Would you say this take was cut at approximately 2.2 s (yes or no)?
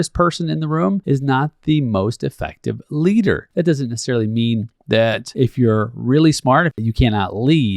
no